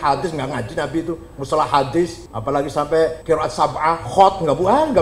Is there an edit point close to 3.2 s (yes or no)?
yes